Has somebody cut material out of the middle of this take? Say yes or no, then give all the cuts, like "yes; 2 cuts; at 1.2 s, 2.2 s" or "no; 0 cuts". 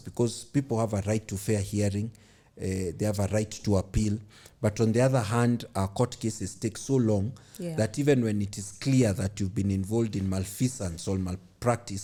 no; 0 cuts